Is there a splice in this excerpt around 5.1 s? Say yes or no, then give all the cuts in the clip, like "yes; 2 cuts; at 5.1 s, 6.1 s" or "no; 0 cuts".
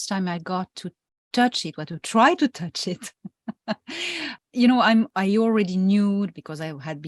yes; 2 cuts; at 4.3 s, 5.1 s